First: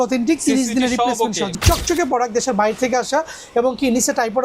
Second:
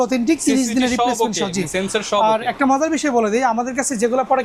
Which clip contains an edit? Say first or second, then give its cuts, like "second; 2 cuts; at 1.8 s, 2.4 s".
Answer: first; 1 cut; at 1.6 s